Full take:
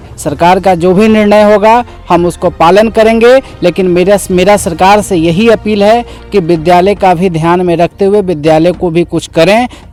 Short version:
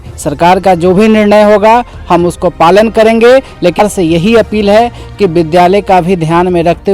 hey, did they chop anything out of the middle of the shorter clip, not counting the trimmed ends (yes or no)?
yes